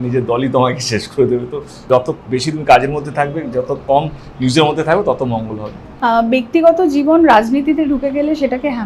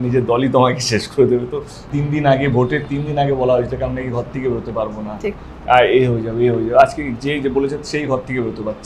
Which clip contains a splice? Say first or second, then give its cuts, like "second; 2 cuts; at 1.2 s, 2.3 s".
second; 1 cut; at 1.8 s